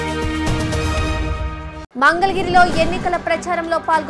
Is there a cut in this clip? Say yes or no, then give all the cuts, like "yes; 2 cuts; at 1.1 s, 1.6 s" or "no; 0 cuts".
no; 0 cuts